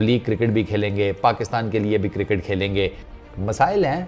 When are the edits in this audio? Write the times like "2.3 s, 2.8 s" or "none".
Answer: 3.1 s

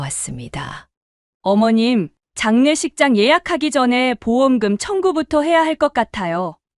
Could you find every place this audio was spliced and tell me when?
none

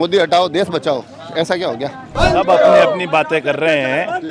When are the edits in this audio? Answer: 2.2 s

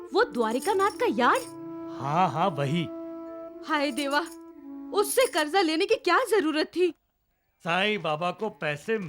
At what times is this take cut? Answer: 6.9 s

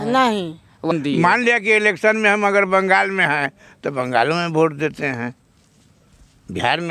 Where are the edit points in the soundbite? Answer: 0.9 s

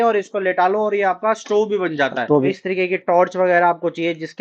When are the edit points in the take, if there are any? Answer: 2.5 s

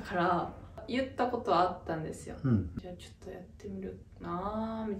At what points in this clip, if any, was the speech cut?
0.8 s, 2.7 s

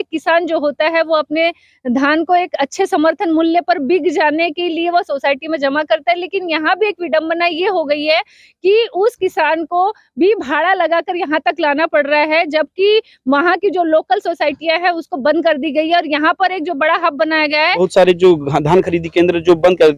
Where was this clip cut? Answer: 17.8 s

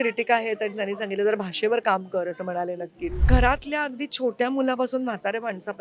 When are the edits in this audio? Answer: 3.2 s

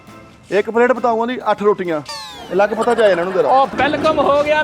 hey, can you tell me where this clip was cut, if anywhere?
3.7 s

